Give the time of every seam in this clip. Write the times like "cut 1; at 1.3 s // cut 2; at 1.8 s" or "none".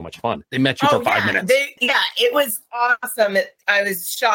cut 1; at 1.8 s // cut 2; at 3.1 s